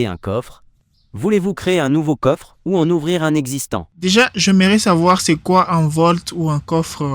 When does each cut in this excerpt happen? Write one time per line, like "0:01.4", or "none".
0:03.8